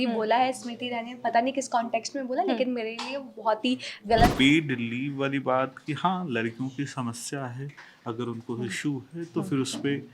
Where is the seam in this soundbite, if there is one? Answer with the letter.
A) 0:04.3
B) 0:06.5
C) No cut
A